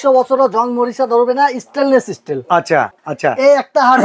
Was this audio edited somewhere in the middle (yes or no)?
yes